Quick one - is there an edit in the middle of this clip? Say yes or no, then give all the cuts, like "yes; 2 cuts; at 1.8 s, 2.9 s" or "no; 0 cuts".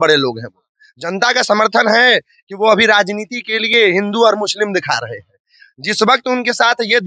no; 0 cuts